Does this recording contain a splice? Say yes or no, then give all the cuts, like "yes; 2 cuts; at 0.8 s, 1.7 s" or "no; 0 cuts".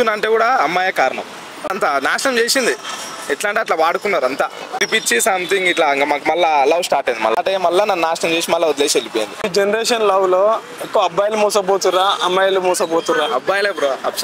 yes; 4 cuts; at 1.7 s, 4.8 s, 7.4 s, 9.5 s